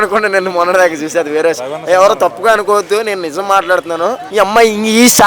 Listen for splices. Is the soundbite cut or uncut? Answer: cut